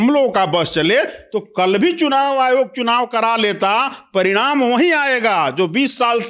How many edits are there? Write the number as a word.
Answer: zero